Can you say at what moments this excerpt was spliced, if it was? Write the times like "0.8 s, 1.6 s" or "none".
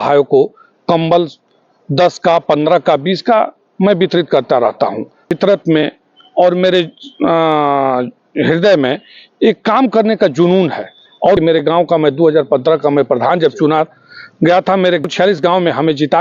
5.3 s, 11.4 s, 15.0 s